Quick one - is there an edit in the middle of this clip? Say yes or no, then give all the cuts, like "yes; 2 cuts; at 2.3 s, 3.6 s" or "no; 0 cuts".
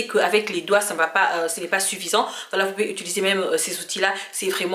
no; 0 cuts